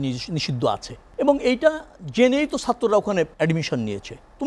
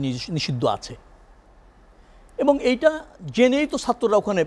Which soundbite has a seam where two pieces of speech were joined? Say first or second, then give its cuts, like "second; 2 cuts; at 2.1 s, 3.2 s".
first; 2 cuts; at 1.0 s, 3.3 s